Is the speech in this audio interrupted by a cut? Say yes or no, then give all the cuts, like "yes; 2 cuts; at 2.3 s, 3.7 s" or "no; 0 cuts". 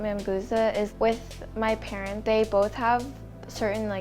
yes; 2 cuts; at 0.9 s, 2.1 s